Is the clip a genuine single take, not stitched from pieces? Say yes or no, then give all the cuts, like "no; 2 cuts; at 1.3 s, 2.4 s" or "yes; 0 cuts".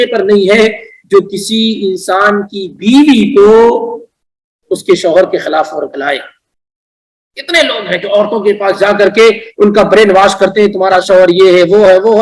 yes; 0 cuts